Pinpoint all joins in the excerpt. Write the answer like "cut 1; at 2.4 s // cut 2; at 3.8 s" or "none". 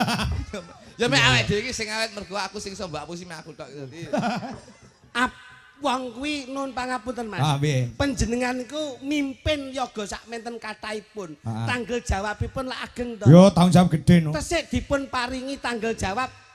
none